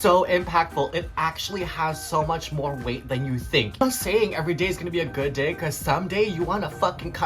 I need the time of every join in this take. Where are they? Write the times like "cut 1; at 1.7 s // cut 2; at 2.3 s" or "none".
cut 1; at 3.8 s